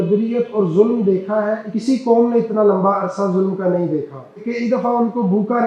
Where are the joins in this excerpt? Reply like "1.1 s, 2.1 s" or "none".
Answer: 1.7 s, 4.5 s